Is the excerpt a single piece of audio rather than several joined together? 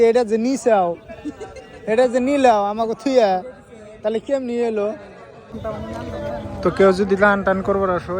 no; 1 cut; at 5.5 s

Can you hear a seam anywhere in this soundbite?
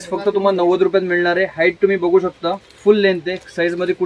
no; 0 cuts

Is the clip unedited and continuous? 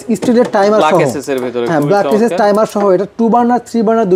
yes; 0 cuts

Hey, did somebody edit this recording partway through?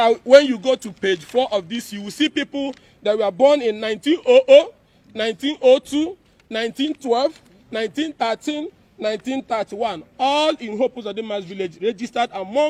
no; 0 cuts

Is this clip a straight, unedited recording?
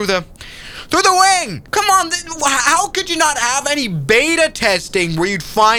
yes; 0 cuts

